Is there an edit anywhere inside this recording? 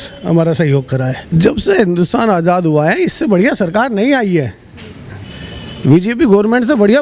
yes; 1 cut; at 1.2 s

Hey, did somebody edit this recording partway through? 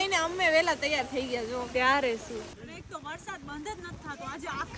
yes; 1 cut; at 2.5 s

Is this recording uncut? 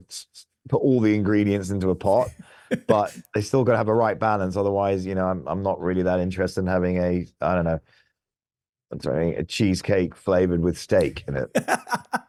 yes; 0 cuts

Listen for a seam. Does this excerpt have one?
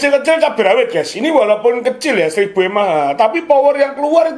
no; 0 cuts

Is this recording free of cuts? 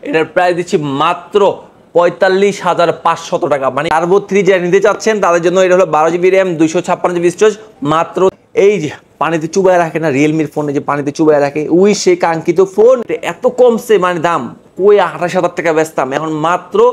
no; 3 cuts; at 3.9 s, 8.4 s, 13.0 s

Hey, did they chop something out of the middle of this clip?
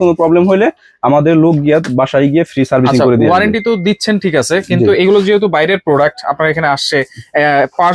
no; 0 cuts

